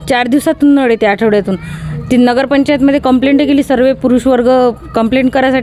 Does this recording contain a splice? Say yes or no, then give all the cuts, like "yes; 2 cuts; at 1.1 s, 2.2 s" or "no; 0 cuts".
no; 0 cuts